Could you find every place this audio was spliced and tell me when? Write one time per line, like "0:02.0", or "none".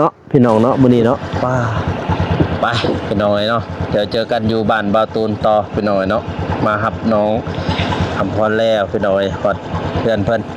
0:01.3